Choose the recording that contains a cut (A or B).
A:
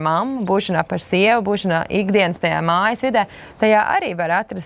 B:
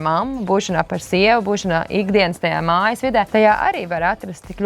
B